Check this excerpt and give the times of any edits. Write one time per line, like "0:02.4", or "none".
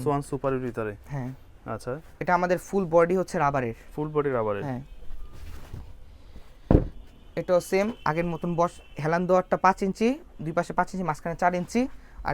none